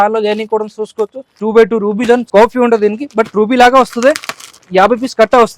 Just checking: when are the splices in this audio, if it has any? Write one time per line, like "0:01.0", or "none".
0:01.3
0:02.2